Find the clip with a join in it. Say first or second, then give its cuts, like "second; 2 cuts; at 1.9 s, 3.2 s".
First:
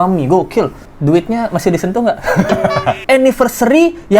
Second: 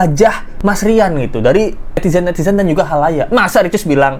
first; 1 cut; at 3.0 s